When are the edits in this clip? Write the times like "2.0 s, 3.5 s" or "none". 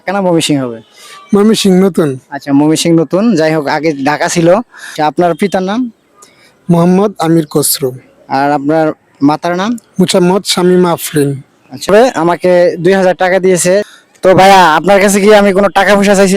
4.8 s, 11.9 s, 13.9 s